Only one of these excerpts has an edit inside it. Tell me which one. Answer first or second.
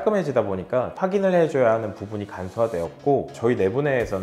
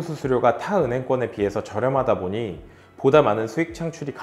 first